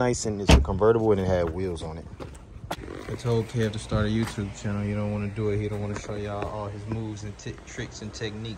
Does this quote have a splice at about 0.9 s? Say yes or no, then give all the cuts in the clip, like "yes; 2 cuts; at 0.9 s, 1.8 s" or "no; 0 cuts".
no; 1 cut; at 2.7 s